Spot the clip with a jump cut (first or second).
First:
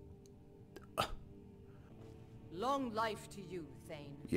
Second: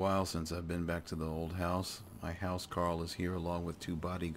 first